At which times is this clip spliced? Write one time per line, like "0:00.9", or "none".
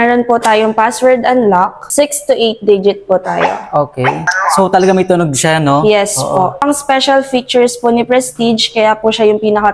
0:01.8
0:04.3
0:06.6